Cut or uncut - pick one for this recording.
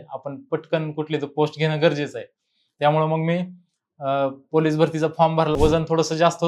cut